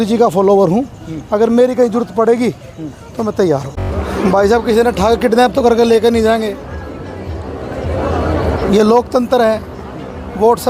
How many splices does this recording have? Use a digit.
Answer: 1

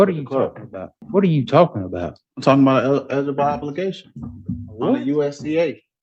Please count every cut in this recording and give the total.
1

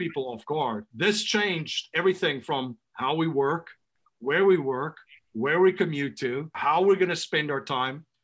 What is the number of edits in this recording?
2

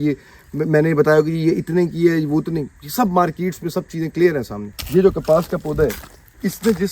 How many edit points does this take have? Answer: 1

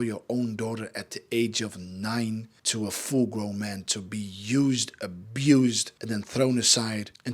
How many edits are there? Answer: 2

